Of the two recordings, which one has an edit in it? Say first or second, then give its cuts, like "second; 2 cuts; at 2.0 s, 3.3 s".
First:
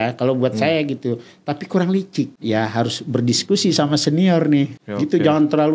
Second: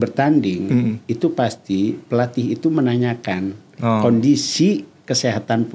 first; 2 cuts; at 2.4 s, 4.7 s